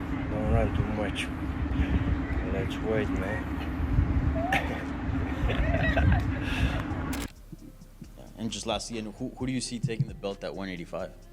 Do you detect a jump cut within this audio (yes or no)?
yes